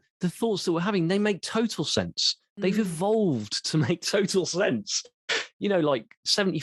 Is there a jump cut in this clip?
no; 0 cuts

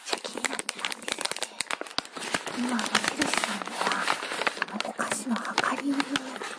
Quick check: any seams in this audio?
yes; 1 cut; at 1.7 s

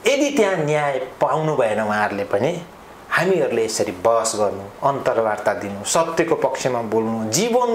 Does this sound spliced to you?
no; 0 cuts

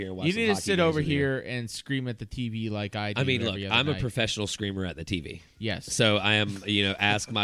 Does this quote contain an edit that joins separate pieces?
no; 0 cuts

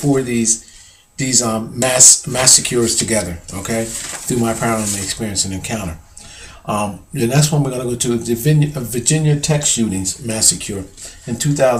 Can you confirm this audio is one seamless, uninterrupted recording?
yes; 0 cuts

